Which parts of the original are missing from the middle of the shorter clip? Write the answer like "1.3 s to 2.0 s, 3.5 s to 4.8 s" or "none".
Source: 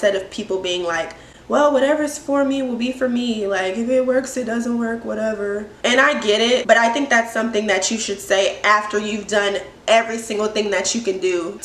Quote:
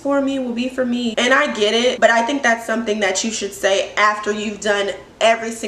3.4 s to 5.8 s